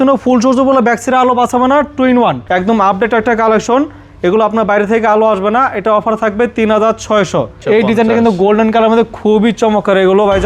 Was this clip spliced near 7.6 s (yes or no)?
yes